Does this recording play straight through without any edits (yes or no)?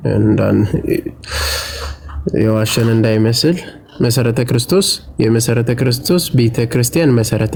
yes